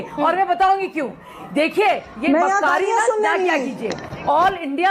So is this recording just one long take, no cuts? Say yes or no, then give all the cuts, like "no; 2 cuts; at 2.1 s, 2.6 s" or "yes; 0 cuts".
yes; 0 cuts